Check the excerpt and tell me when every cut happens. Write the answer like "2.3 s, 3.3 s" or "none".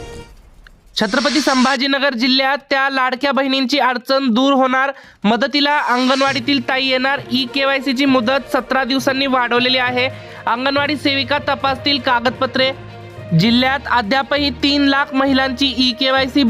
1.0 s